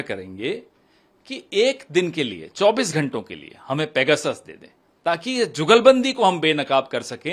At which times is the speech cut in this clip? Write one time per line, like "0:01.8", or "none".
none